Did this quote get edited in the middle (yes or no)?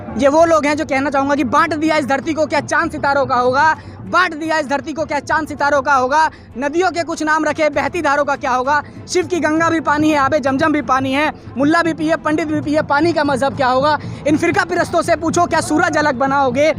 no